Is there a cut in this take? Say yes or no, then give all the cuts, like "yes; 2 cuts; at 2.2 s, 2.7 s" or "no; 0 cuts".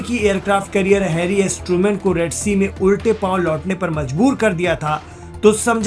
no; 0 cuts